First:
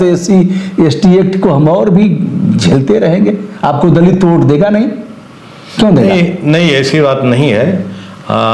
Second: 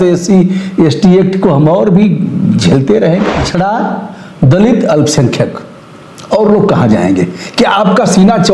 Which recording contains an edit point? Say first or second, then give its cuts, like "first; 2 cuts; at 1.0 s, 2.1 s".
second; 1 cut; at 3.4 s